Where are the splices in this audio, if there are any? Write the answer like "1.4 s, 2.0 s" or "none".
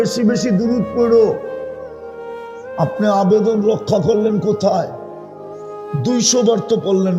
1.4 s, 2.8 s